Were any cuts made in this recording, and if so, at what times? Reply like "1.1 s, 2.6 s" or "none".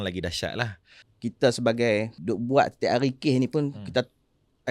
1.0 s, 2.1 s